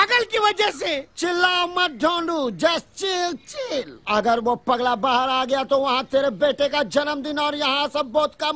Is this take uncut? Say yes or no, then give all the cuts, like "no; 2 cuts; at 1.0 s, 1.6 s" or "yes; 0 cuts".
yes; 0 cuts